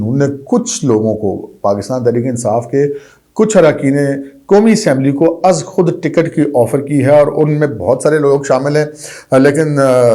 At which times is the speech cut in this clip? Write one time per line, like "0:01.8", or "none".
none